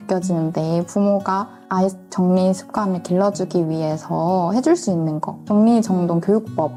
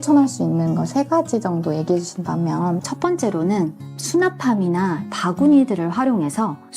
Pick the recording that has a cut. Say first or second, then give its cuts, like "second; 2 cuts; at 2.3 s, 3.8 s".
second; 2 cuts; at 2.8 s, 5.1 s